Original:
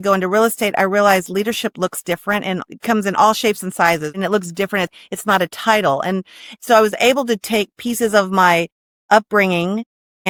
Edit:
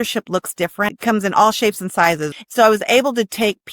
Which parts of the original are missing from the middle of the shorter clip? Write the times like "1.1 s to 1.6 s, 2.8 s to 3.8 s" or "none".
2.4 s to 2.7 s, 4.1 s to 6.4 s